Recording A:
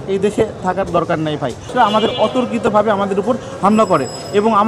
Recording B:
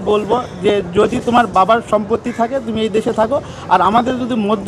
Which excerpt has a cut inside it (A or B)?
A